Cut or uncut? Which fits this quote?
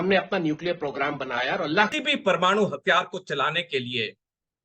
cut